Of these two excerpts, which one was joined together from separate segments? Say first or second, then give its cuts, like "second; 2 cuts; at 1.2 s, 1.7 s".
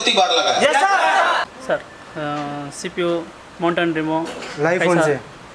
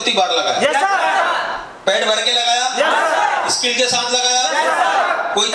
first; 1 cut; at 1.5 s